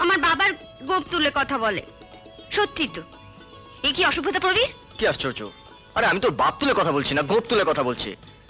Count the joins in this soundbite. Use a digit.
0